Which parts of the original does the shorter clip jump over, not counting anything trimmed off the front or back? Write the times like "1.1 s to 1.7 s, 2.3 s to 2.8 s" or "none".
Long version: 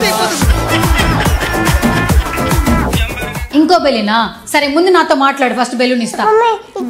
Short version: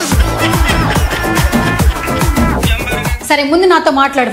3.4 s to 4.4 s